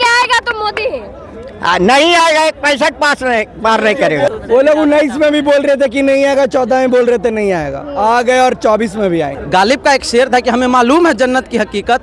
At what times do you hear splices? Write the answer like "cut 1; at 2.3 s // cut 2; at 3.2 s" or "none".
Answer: cut 1; at 4.3 s // cut 2; at 9.4 s